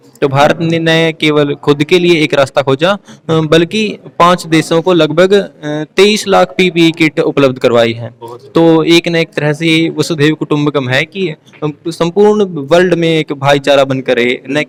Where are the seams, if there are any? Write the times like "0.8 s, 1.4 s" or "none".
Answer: none

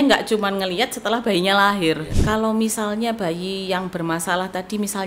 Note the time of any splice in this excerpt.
2.1 s

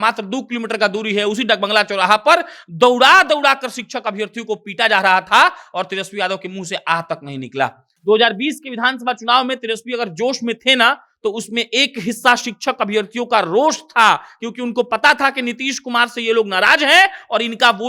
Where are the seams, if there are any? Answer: 7.9 s

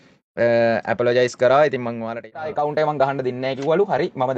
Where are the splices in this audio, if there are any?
2.5 s

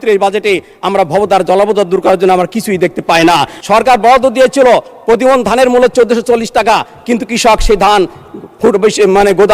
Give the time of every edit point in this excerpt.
3.5 s

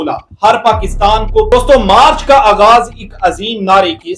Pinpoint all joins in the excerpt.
1.5 s

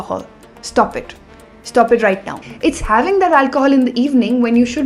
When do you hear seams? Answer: 2.4 s

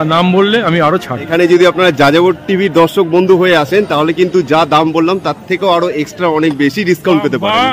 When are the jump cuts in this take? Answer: 1.3 s

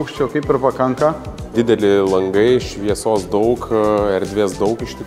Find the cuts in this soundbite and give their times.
1.5 s

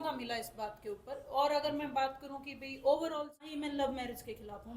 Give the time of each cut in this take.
3.5 s

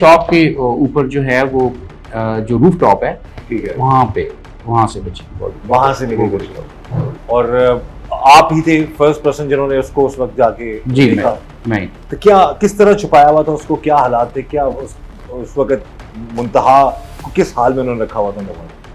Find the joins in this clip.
none

